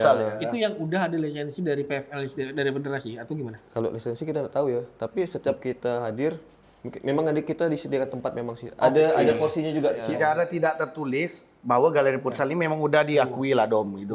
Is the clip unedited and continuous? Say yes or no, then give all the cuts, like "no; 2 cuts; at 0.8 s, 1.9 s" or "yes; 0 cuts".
no; 1 cut; at 10.0 s